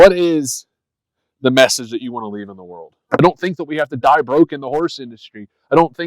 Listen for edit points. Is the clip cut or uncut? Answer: cut